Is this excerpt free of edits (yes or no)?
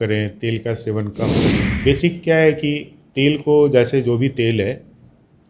no